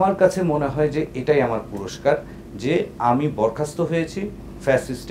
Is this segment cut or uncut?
uncut